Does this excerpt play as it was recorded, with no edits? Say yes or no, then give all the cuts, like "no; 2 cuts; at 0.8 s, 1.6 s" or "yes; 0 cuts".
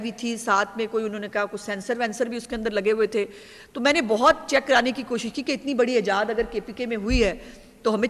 yes; 0 cuts